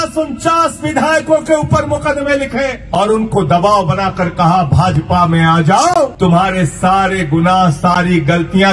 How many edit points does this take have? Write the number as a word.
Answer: two